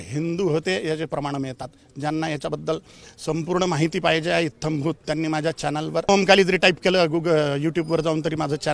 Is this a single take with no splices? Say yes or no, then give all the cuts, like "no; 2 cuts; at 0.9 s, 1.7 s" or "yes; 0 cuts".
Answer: no; 1 cut; at 6.1 s